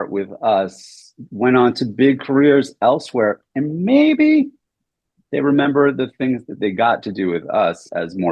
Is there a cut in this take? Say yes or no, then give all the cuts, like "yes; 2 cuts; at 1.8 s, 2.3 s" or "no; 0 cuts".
no; 0 cuts